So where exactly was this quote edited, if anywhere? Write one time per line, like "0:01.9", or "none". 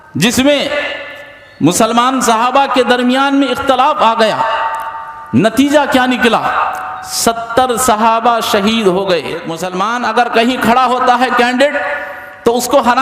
0:09.6